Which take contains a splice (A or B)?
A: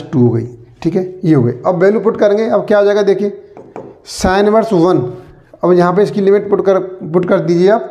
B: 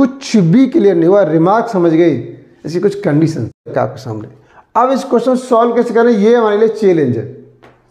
B